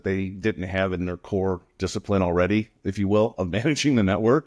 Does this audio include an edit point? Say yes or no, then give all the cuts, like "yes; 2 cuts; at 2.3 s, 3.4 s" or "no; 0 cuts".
no; 0 cuts